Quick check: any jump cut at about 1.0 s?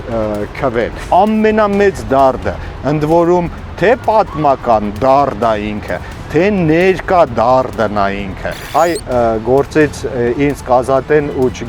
yes; 2 cuts; at 1.0 s, 8.6 s

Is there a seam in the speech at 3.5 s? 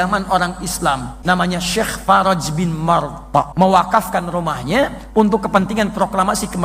yes; 2 cuts; at 1.1 s, 3.5 s

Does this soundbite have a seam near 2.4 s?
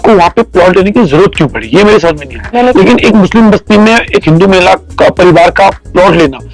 yes; 1 cut; at 2.4 s

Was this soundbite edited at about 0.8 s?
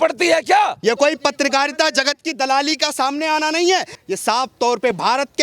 yes; 2 cuts; at 0.8 s, 4.0 s

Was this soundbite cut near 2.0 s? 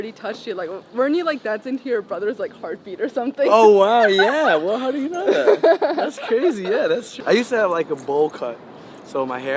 no; 1 cut; at 7.1 s

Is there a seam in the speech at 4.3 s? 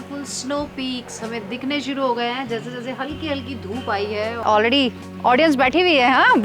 yes; 1 cut; at 4.3 s

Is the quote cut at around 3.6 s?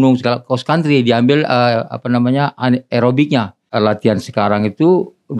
yes; 1 cut; at 3.6 s

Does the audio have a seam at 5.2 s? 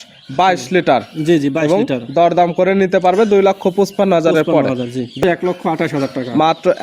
yes; 1 cut; at 5.2 s

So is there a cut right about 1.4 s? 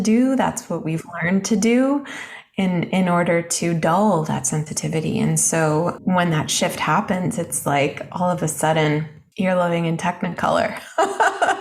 no; 2 cuts; at 6.0 s, 9.2 s

